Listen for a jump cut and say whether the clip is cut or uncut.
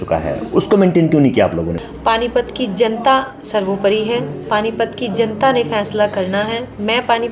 cut